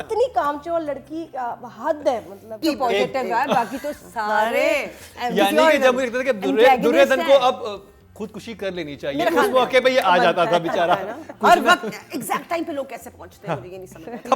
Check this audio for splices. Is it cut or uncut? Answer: cut